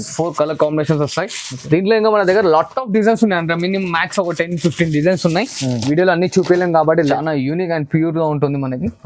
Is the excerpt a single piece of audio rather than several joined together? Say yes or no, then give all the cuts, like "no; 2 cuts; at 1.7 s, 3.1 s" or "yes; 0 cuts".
no; 1 cut; at 7.1 s